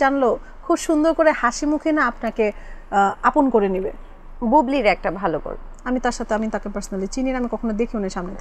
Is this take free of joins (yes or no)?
yes